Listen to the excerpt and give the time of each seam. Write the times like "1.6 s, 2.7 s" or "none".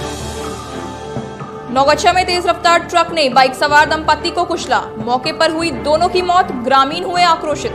1.3 s